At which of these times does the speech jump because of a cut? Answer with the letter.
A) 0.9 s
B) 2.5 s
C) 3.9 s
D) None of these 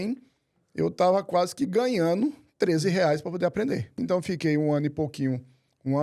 C